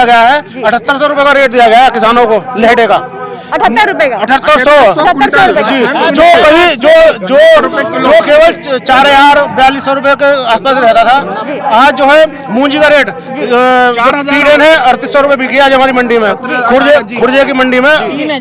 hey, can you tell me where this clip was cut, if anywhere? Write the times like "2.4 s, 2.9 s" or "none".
none